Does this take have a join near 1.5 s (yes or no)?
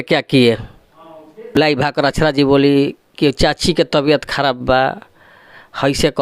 yes